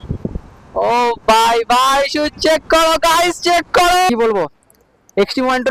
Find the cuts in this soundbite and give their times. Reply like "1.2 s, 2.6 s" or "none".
4.1 s